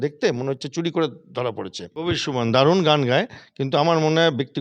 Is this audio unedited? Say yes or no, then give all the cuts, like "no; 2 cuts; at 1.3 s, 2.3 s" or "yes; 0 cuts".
no; 1 cut; at 1.8 s